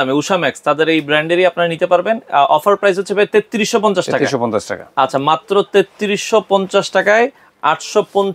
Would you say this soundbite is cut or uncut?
uncut